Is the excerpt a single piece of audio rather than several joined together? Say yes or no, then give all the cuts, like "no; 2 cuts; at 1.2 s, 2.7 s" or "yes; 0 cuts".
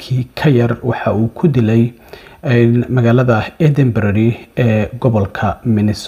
yes; 0 cuts